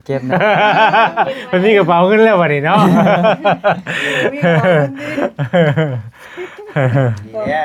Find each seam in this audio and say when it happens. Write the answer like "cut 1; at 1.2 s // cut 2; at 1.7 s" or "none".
none